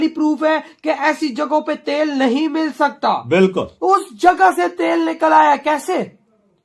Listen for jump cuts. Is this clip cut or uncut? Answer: uncut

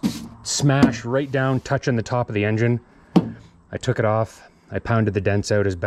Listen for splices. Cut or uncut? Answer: uncut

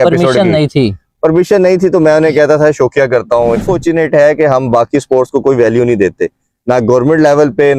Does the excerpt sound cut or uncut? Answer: cut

